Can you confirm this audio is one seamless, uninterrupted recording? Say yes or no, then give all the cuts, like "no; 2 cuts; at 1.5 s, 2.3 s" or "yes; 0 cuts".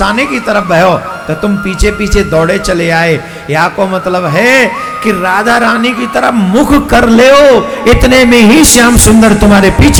yes; 0 cuts